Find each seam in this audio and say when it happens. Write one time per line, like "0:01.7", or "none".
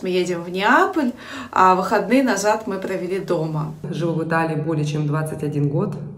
0:03.9

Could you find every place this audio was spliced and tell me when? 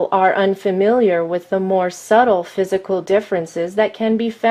none

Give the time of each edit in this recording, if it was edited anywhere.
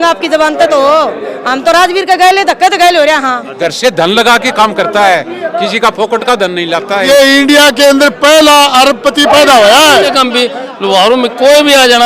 0:03.5
0:07.1
0:10.1

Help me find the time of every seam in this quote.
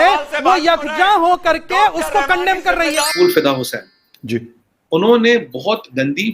0:03.1

